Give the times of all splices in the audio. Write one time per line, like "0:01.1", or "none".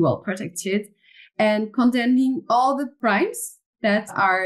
0:02.9